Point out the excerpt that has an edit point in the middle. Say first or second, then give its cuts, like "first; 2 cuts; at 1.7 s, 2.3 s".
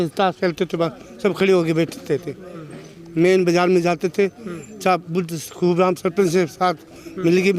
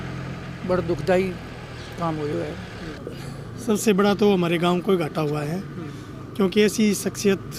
second; 1 cut; at 3.0 s